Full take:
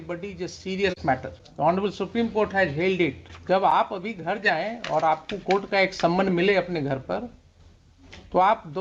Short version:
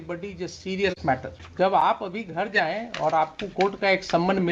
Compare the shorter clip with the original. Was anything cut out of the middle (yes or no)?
yes